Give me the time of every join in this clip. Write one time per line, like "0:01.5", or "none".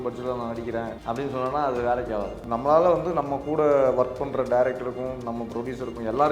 0:00.9
0:02.4